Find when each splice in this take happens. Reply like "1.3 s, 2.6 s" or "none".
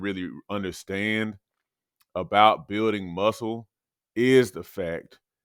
none